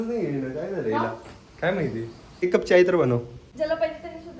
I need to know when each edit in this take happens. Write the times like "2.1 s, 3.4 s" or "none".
2.4 s, 3.4 s